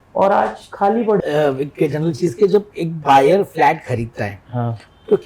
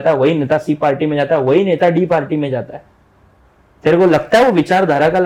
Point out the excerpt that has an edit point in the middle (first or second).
first